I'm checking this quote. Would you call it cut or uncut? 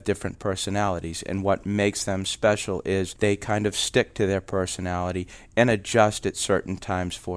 cut